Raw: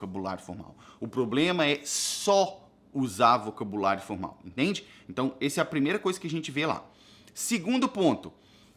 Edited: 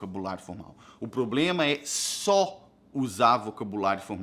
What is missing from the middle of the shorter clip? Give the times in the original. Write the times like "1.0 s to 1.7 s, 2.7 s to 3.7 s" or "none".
none